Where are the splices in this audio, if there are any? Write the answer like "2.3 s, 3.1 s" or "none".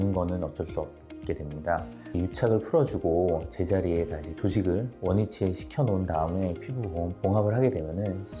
none